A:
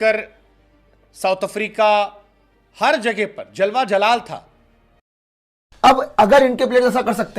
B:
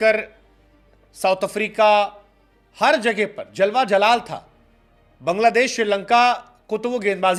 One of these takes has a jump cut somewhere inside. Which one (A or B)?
A